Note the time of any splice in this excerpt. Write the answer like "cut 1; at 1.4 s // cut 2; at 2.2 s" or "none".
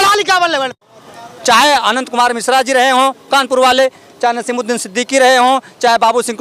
cut 1; at 1.0 s